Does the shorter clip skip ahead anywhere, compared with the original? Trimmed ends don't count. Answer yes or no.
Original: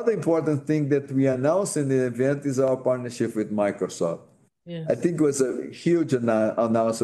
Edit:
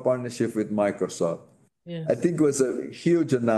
no